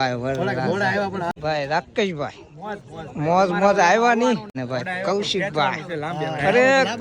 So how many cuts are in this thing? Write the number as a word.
two